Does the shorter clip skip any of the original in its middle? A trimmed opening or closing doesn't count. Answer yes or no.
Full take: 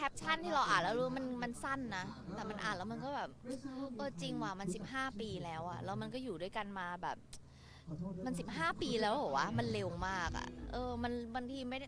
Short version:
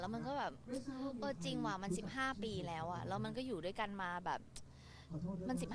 no